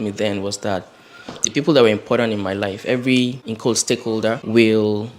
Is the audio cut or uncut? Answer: cut